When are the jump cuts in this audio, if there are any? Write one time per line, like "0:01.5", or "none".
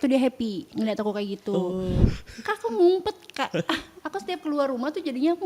0:02.0